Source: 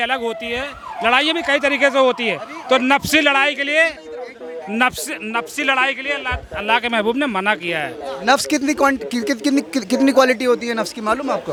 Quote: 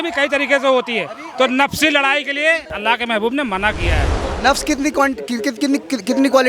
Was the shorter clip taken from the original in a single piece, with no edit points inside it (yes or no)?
no